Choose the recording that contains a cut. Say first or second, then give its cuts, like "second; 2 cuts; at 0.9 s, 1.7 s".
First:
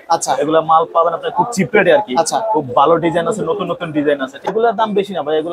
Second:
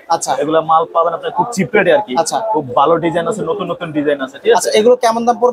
first; 1 cut; at 4.5 s